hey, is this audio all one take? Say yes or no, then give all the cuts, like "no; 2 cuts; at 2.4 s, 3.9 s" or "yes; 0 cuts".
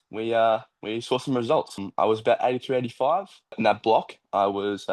no; 2 cuts; at 1.9 s, 3.6 s